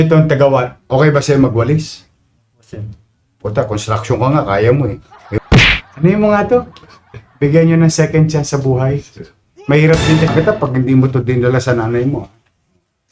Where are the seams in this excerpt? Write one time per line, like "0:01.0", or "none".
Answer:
0:05.4
0:10.3